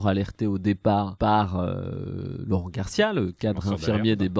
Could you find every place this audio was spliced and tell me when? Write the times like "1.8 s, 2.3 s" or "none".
1.1 s